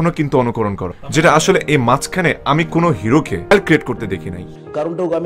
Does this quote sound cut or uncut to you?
cut